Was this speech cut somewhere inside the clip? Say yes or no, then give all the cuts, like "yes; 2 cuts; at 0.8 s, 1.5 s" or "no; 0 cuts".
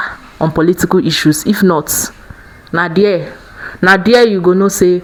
no; 0 cuts